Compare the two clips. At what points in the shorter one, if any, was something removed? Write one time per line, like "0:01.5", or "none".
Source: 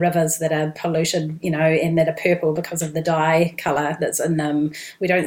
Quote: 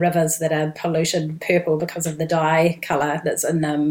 0:01.4